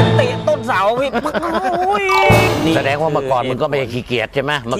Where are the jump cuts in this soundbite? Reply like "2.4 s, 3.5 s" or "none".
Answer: 2.4 s